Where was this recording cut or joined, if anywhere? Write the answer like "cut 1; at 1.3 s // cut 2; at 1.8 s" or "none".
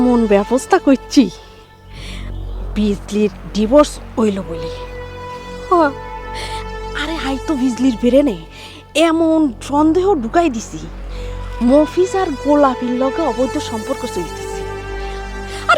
none